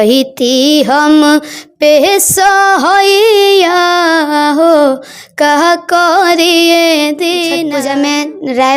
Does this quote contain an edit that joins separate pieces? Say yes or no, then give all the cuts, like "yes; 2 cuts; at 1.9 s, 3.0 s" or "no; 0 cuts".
yes; 1 cut; at 7.6 s